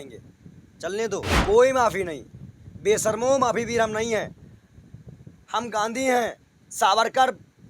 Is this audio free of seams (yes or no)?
no